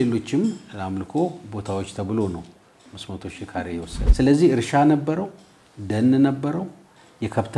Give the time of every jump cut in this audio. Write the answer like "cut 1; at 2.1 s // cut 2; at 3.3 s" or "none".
cut 1; at 4.0 s